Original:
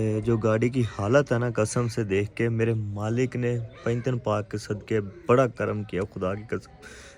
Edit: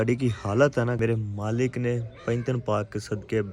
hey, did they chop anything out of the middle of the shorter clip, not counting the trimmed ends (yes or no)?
yes